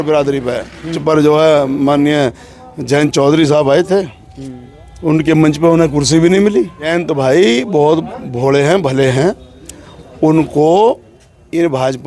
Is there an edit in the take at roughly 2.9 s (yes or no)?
no